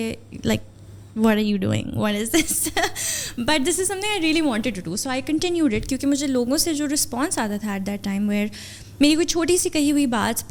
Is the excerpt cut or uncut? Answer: uncut